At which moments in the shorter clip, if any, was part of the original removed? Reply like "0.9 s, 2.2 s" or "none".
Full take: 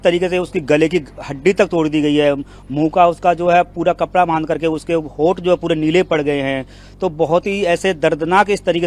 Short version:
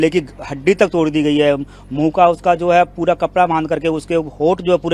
none